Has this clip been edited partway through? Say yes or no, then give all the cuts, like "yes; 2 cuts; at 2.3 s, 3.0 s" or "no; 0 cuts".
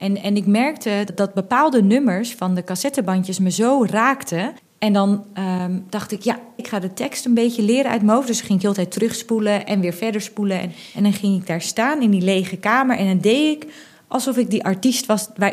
yes; 4 cuts; at 1.1 s, 4.6 s, 6.6 s, 10.8 s